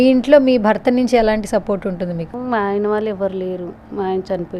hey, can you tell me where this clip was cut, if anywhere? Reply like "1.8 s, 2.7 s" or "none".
2.3 s